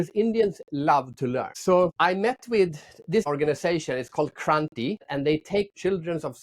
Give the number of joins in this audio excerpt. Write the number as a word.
one